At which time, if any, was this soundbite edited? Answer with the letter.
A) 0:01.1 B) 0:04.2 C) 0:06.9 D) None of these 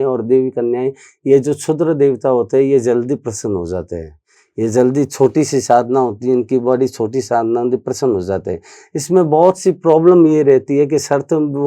D